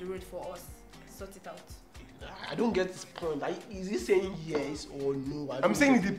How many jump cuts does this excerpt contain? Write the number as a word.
one